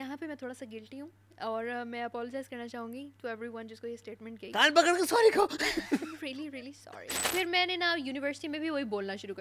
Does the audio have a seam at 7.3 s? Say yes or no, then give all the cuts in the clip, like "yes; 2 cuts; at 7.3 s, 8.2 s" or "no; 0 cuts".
yes; 1 cut; at 7.3 s